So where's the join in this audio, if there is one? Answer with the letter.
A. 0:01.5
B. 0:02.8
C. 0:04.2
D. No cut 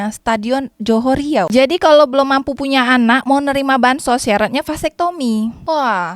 A